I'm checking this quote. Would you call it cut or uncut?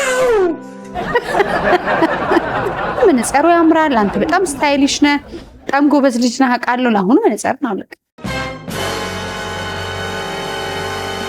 cut